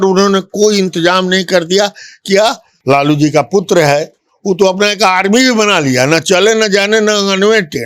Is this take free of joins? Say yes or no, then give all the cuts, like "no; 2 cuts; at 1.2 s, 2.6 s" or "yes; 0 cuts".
no; 1 cut; at 2.7 s